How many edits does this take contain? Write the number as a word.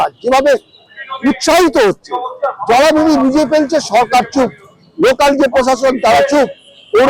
zero